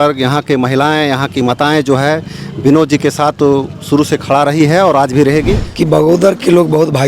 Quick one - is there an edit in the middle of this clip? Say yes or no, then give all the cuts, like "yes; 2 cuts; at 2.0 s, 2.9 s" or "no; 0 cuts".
yes; 1 cut; at 5.6 s